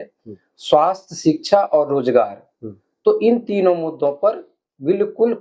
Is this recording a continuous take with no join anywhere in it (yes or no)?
yes